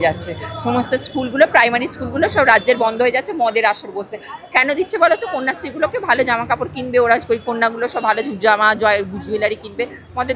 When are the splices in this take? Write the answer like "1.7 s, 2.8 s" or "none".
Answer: none